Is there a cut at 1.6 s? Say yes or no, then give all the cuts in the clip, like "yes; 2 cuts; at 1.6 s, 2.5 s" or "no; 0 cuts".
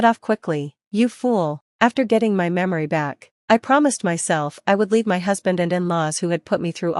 yes; 1 cut; at 1.6 s